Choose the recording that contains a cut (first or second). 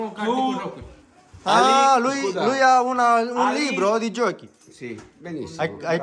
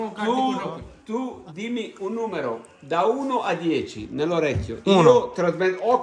second